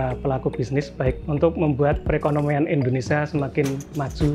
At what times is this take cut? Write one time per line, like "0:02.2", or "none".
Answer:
0:01.2